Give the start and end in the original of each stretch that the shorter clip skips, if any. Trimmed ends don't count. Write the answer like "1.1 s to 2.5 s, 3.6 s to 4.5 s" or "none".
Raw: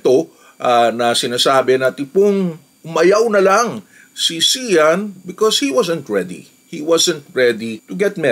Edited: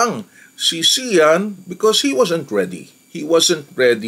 none